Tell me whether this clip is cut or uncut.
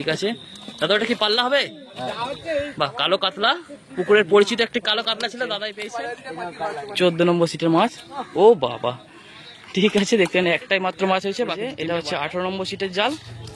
cut